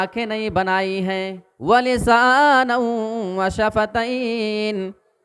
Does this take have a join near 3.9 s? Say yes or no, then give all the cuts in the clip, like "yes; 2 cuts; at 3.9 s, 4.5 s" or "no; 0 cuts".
no; 1 cut; at 1.5 s